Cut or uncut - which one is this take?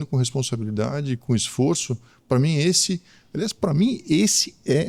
uncut